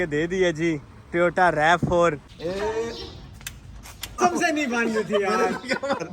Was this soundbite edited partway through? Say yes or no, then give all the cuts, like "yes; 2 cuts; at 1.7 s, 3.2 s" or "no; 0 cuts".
yes; 2 cuts; at 2.3 s, 4.2 s